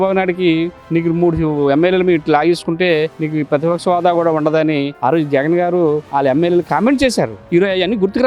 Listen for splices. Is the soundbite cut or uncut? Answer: cut